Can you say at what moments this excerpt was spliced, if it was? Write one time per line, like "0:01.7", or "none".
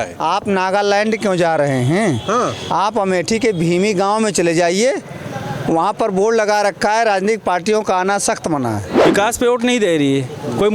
0:09.1